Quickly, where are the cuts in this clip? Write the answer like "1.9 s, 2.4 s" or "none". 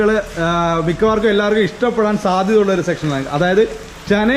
none